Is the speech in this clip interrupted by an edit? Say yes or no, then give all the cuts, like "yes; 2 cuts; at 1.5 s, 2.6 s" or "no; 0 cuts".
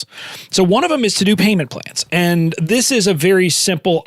yes; 1 cut; at 2.6 s